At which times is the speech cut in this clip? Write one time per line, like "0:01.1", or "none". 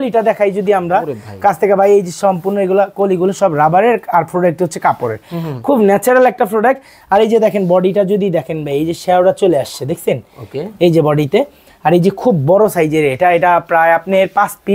none